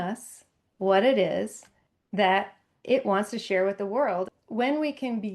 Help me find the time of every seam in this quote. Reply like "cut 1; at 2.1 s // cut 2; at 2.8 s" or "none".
cut 1; at 4.4 s